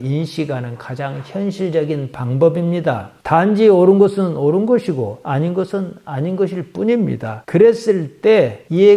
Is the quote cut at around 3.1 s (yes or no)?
yes